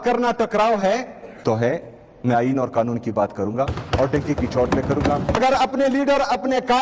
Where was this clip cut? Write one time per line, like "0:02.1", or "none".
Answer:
0:01.2
0:05.4